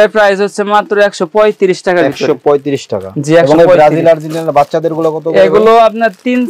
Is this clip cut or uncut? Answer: uncut